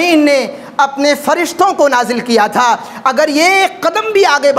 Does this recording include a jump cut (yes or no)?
no